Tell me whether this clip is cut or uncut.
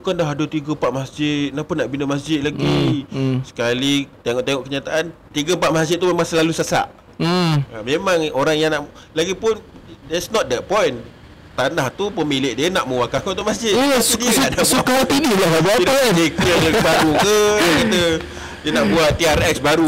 uncut